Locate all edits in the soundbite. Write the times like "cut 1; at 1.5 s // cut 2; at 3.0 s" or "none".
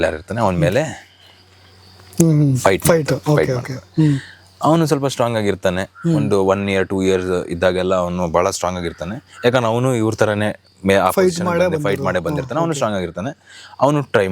none